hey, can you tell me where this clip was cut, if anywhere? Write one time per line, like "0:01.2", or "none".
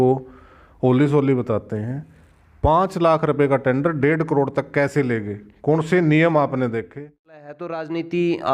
0:07.5